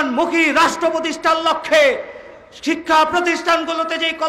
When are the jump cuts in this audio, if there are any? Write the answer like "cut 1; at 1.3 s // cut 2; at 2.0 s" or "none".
none